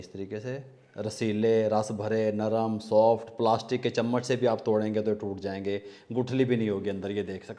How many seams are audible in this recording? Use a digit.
0